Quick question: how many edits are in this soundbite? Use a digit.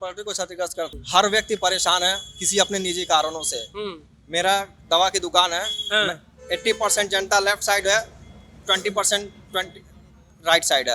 1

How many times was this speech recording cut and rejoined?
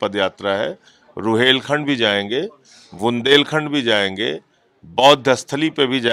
0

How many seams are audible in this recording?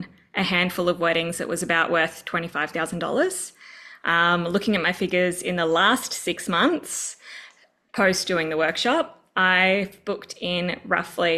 0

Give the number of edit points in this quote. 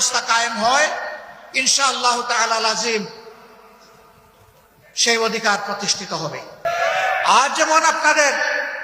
1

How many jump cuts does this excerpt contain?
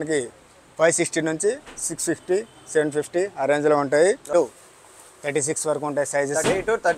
1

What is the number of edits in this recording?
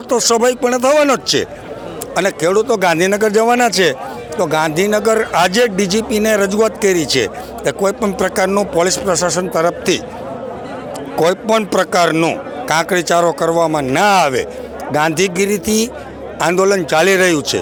0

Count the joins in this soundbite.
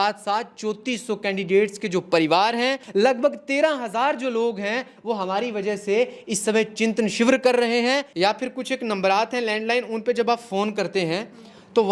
2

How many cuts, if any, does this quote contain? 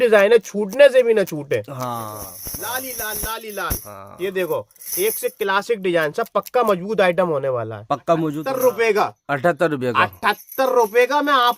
2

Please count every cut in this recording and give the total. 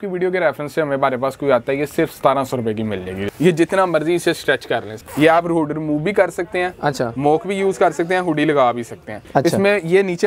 3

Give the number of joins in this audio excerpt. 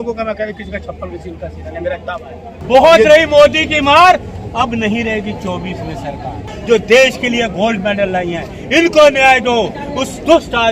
2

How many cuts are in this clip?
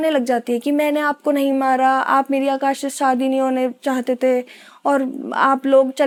0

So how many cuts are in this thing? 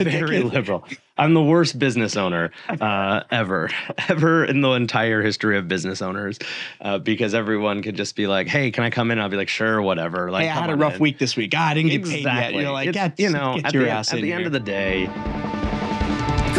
1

